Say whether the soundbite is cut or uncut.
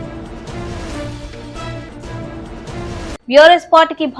cut